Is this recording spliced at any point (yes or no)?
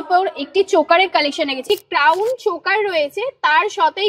yes